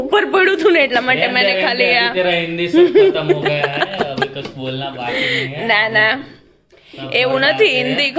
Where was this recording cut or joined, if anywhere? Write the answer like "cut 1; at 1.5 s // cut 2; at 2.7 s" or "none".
none